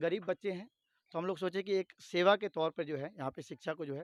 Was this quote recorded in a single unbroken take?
yes; 0 cuts

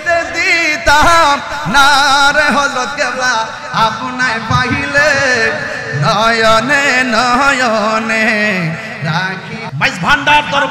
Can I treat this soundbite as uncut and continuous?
no; 1 cut; at 9.6 s

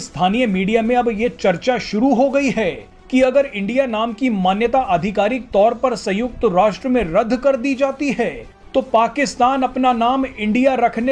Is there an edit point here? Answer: no; 0 cuts

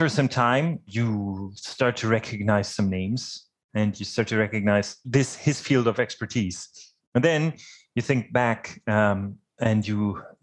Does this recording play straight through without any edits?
no; 2 cuts; at 0.9 s, 5.1 s

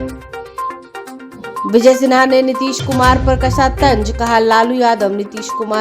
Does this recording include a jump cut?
yes; 1 cut; at 1.2 s

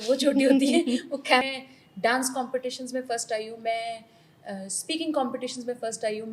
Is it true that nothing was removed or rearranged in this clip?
no; 1 cut; at 1.4 s

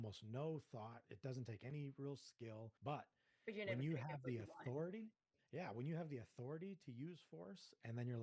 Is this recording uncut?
no; 1 cut; at 2.7 s

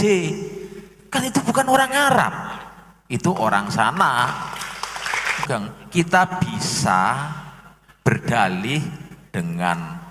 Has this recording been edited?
yes; 1 cut; at 5.4 s

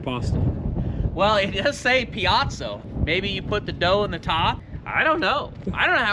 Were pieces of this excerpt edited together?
yes; 2 cuts; at 2.9 s, 4.7 s

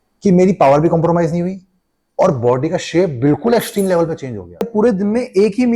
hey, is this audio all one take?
no; 1 cut; at 4.7 s

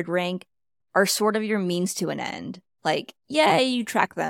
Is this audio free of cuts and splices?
yes; 0 cuts

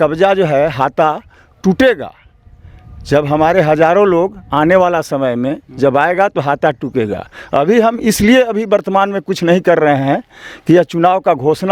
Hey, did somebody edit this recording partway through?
no; 0 cuts

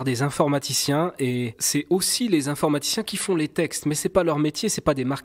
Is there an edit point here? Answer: yes; 1 cut; at 1.6 s

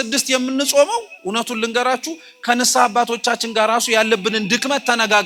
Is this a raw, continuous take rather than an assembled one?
yes; 0 cuts

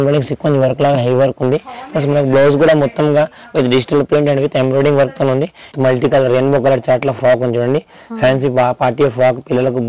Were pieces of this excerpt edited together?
yes; 1 cut; at 5.7 s

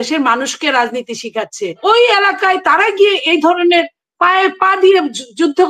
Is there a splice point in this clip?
yes; 1 cut; at 1.8 s

